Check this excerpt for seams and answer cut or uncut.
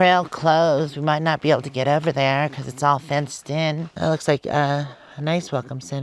uncut